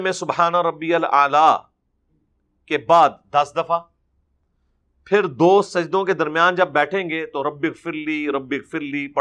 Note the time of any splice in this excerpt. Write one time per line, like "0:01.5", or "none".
none